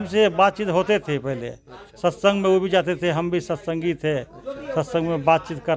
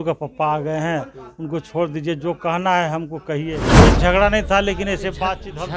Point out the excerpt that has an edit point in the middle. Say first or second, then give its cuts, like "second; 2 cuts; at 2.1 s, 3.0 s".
second; 1 cut; at 3.6 s